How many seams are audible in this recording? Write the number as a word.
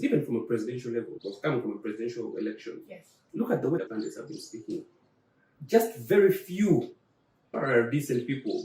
two